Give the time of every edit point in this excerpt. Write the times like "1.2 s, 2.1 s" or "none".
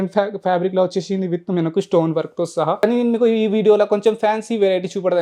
2.8 s